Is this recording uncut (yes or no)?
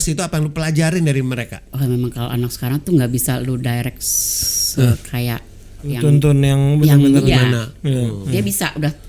no